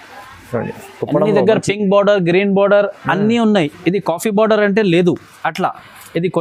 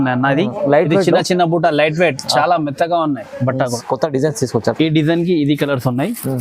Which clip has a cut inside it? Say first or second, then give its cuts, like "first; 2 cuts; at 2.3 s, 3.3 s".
second; 1 cut; at 3.8 s